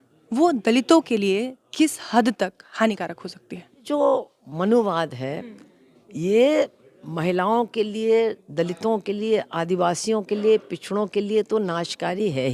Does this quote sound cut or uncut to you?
cut